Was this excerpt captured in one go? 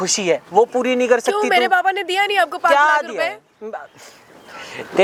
yes; 0 cuts

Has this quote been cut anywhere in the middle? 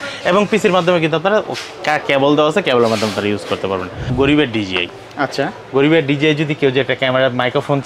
yes; 1 cut; at 4.0 s

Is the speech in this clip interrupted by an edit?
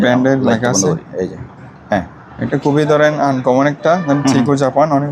yes; 1 cut; at 2.5 s

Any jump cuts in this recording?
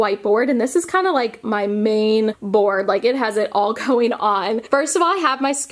no; 0 cuts

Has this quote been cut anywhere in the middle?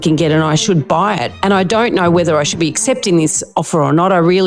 yes; 1 cut; at 1.3 s

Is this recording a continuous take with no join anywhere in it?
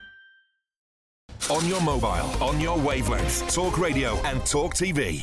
no; 1 cut; at 1.0 s

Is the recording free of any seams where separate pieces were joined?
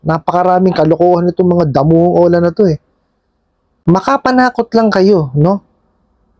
no; 1 cut; at 3.8 s

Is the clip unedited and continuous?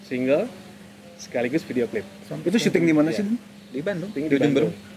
yes; 0 cuts

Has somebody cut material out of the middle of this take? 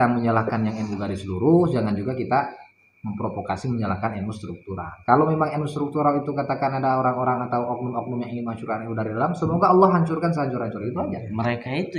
no; 0 cuts

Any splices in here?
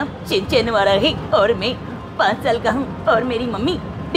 no; 0 cuts

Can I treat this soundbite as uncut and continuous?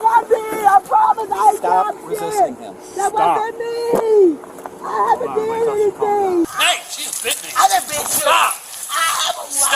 no; 1 cut; at 6.6 s

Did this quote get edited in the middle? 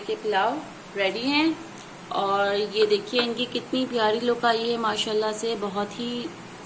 no; 0 cuts

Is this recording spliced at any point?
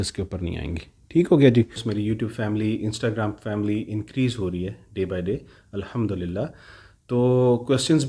yes; 1 cut; at 1.9 s

